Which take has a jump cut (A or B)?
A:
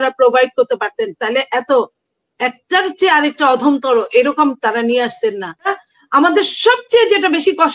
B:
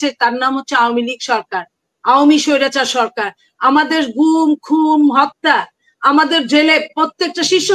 A